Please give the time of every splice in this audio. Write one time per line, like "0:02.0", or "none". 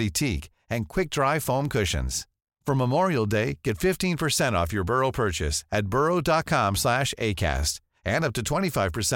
none